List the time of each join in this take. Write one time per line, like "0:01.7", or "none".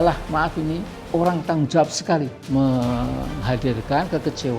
0:00.9
0:02.4